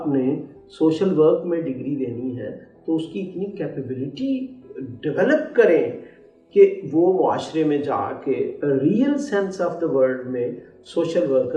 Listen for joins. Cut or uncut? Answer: uncut